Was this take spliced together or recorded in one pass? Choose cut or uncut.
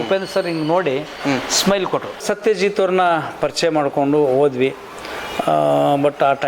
cut